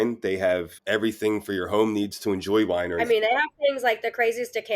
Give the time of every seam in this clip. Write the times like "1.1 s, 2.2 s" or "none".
3.0 s